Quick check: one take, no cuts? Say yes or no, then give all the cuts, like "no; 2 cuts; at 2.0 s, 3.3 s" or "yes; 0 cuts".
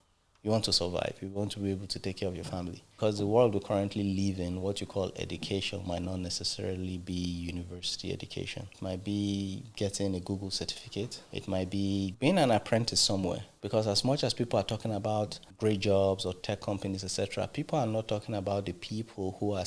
no; 6 cuts; at 2.9 s, 8.7 s, 11.2 s, 12.1 s, 13.5 s, 15.4 s